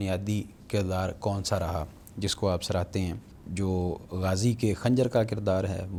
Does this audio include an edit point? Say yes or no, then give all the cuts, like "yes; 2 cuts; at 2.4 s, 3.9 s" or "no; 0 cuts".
no; 0 cuts